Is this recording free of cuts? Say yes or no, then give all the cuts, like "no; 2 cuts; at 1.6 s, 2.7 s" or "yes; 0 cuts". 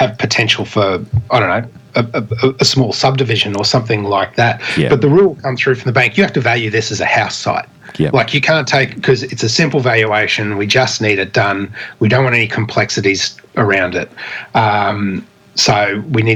yes; 0 cuts